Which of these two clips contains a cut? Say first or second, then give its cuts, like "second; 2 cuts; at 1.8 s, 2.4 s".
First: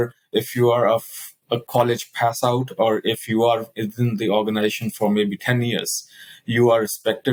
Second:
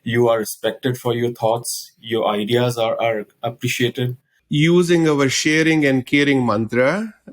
second; 1 cut; at 4.4 s